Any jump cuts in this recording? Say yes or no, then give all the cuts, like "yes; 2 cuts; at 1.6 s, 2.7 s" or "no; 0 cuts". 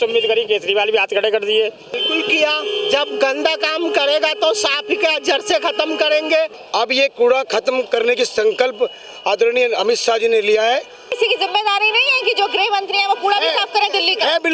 yes; 3 cuts; at 2.0 s, 6.6 s, 11.1 s